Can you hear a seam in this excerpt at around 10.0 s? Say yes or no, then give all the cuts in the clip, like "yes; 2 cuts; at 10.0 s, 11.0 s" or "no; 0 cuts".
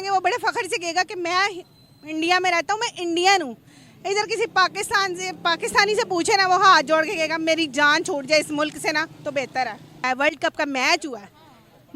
yes; 1 cut; at 10.0 s